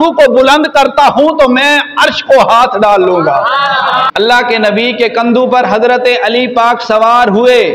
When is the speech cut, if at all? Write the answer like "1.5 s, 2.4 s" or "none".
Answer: 4.1 s